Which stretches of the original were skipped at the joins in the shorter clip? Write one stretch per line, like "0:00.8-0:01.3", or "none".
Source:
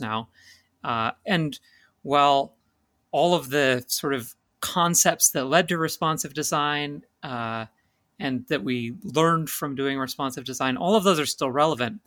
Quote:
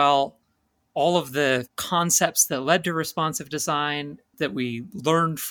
0:03.9-0:04.6
0:07.2-0:08.4